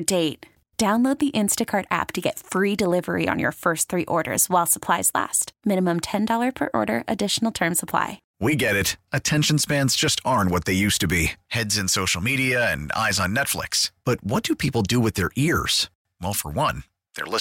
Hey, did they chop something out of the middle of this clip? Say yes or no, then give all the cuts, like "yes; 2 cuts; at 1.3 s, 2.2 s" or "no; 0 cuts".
yes; 1 cut; at 8.2 s